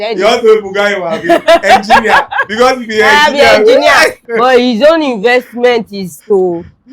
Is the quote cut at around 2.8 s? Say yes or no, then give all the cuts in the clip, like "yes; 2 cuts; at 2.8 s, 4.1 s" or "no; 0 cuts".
no; 1 cut; at 4.2 s